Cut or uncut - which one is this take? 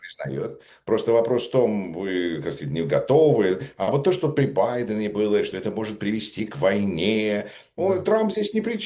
uncut